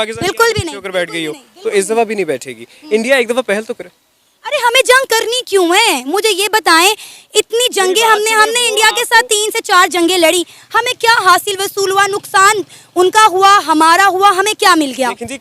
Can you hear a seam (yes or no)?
no